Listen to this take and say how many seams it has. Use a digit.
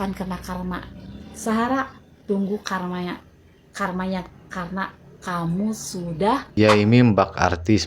1